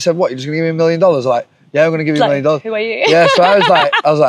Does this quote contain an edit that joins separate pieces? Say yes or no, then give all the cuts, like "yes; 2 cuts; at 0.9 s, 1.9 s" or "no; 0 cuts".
no; 0 cuts